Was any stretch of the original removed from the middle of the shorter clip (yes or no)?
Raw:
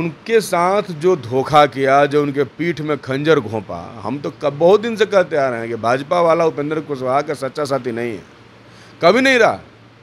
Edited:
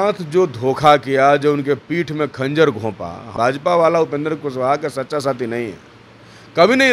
yes